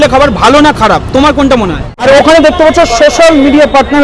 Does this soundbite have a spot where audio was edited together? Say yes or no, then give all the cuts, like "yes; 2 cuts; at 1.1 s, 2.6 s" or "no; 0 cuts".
yes; 1 cut; at 2.0 s